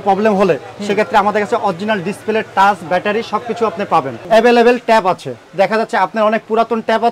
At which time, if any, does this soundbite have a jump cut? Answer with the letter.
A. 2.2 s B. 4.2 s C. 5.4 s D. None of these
B